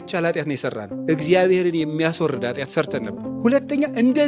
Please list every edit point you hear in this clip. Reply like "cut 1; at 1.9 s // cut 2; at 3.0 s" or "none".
cut 1; at 0.9 s // cut 2; at 3.4 s